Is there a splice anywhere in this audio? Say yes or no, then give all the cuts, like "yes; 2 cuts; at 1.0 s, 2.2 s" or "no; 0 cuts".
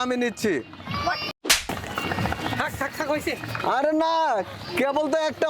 yes; 1 cut; at 1.5 s